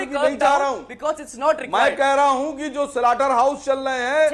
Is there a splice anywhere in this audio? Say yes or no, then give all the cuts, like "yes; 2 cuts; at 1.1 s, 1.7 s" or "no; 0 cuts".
no; 0 cuts